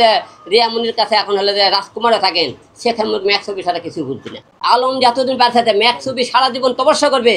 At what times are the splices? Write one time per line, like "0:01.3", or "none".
0:04.4